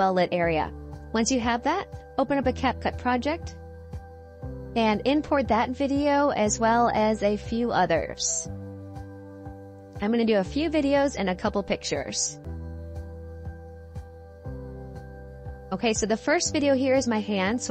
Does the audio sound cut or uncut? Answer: uncut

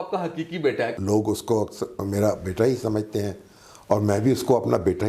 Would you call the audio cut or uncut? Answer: cut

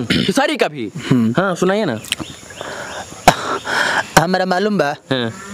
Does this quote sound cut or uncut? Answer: uncut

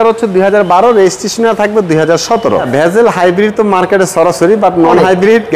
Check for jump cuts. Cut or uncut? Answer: cut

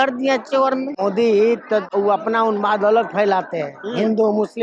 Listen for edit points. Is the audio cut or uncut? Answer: cut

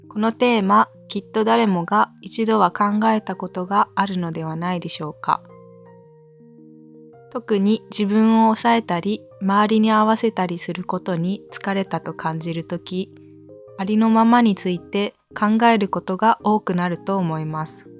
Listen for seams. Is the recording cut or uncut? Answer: uncut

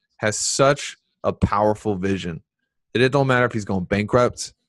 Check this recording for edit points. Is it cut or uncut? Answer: uncut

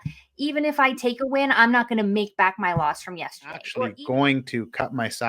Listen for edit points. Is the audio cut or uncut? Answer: cut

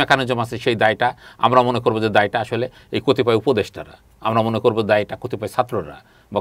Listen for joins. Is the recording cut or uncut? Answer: uncut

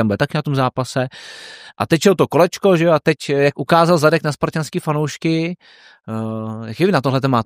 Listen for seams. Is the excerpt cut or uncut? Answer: uncut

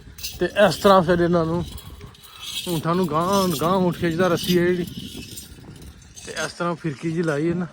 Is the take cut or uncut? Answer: uncut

